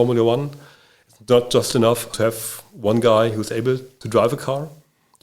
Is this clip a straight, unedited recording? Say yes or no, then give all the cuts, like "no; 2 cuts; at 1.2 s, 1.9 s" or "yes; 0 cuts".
no; 2 cuts; at 2.1 s, 3.9 s